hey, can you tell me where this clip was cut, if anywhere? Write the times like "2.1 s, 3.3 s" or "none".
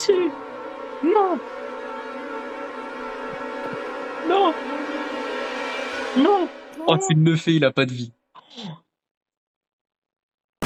none

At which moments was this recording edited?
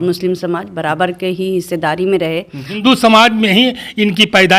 2.8 s

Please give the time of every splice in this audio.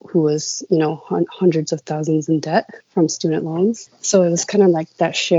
none

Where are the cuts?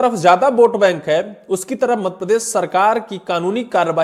none

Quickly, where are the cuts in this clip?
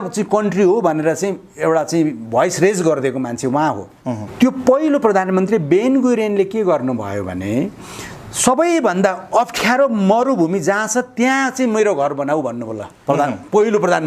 4.3 s

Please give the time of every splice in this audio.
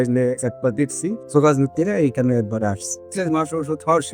1.2 s, 3.0 s

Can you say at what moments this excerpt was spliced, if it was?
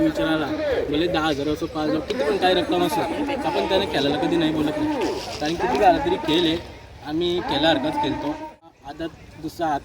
8.7 s

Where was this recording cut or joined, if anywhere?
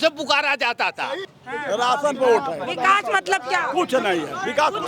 1.2 s

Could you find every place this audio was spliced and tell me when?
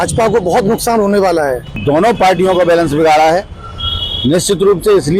1.8 s

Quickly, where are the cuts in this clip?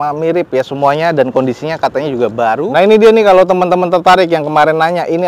2.6 s

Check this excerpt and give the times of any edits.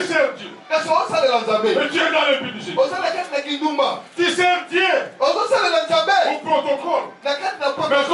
none

